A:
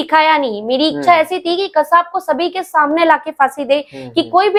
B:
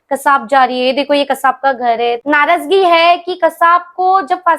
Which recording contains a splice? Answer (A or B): B